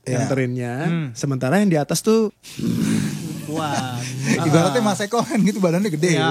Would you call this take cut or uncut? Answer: cut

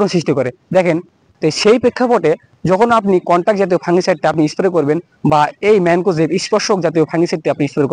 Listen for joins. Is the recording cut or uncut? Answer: cut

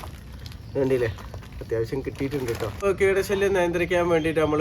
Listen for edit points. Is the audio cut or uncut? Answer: cut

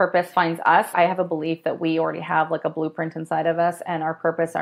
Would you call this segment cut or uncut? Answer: cut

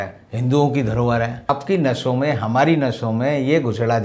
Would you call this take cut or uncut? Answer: cut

